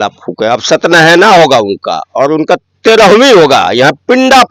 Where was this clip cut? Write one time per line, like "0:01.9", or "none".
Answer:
none